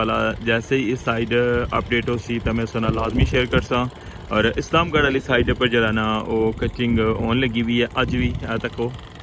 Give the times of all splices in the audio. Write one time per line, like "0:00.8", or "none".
none